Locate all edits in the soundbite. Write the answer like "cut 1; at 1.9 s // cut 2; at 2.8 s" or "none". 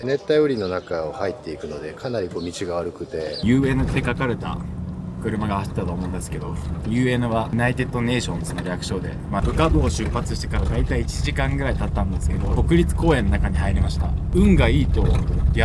cut 1; at 3.4 s // cut 2; at 9.4 s // cut 3; at 14.2 s